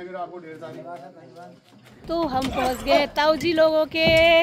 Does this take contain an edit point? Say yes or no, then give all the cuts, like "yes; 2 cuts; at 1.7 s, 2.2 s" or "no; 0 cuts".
yes; 1 cut; at 2.3 s